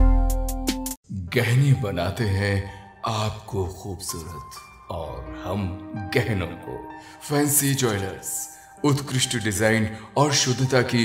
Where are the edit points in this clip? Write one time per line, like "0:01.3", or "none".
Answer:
none